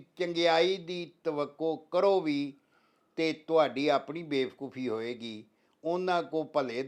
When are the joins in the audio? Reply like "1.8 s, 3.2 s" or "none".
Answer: none